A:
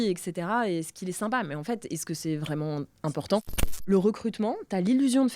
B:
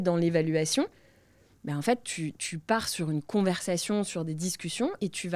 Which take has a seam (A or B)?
A